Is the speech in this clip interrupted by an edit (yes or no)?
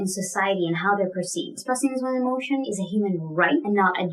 yes